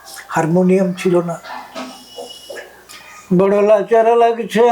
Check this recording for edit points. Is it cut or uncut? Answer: cut